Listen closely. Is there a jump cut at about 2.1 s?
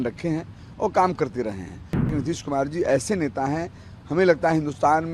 yes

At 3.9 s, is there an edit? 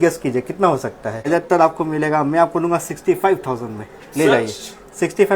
no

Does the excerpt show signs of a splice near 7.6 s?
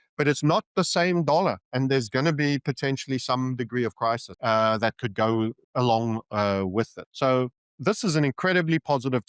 yes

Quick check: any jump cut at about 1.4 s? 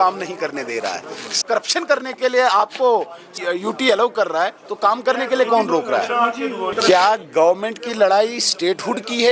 yes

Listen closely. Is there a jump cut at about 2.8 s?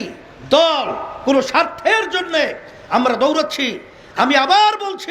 no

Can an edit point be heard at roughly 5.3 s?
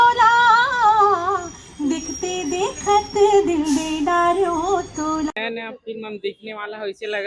yes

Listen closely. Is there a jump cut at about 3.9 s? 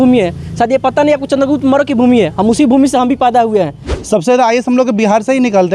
yes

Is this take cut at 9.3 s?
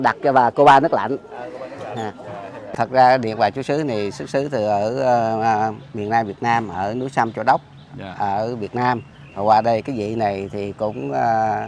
no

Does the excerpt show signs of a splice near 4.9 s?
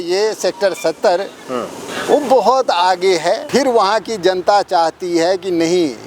no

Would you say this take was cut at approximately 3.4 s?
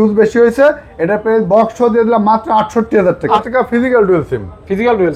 yes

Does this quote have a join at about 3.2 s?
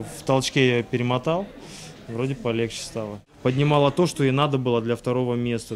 yes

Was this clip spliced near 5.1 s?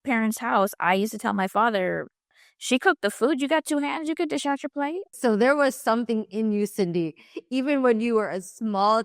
yes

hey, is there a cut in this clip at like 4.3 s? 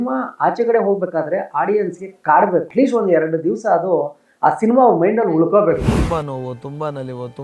no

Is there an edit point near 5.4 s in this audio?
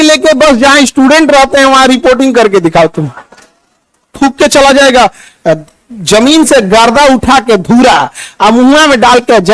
no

